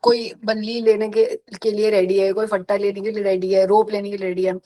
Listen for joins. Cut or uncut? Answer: uncut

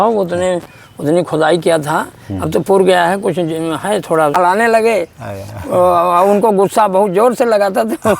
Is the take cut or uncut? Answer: cut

